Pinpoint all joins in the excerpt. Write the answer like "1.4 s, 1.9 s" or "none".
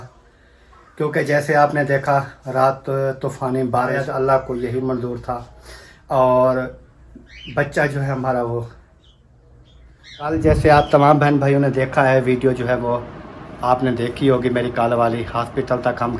4.0 s, 10.4 s